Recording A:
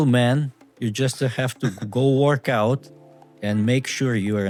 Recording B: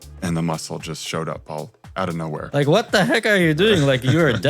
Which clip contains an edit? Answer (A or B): B